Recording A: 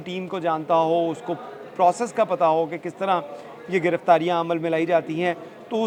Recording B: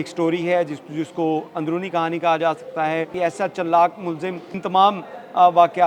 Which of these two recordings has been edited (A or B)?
B